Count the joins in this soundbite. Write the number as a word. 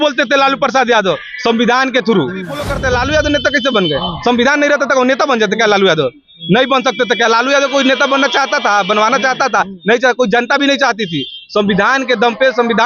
one